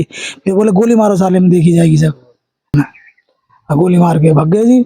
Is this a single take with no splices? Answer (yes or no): no